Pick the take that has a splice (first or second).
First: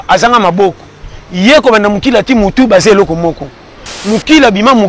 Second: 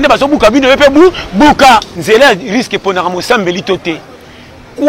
second